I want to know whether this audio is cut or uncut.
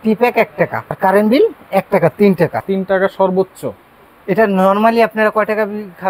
cut